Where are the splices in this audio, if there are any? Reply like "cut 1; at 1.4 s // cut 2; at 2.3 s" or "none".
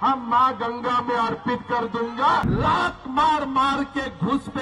cut 1; at 2.5 s